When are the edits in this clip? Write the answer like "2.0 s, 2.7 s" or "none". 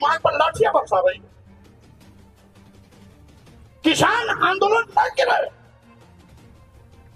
1.3 s, 3.8 s